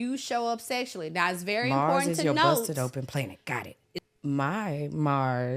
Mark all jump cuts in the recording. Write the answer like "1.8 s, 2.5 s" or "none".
4.0 s